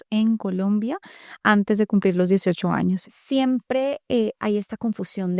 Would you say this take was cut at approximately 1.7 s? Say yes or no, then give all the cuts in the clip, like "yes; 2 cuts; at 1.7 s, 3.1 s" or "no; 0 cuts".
no; 1 cut; at 3.0 s